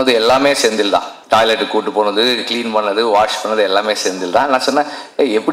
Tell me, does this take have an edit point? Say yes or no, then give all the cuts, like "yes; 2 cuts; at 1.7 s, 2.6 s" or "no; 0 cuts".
yes; 1 cut; at 1.1 s